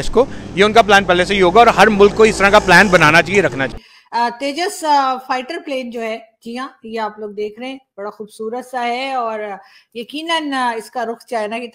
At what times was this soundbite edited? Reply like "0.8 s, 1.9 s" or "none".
3.8 s